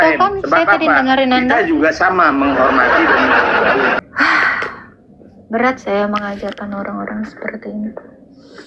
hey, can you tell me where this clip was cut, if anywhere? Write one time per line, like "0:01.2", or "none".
0:04.0